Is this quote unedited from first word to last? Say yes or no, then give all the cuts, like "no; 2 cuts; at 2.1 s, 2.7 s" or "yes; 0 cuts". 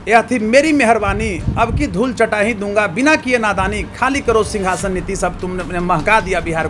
yes; 0 cuts